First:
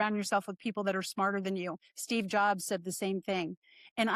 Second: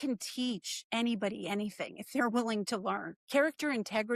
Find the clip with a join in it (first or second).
second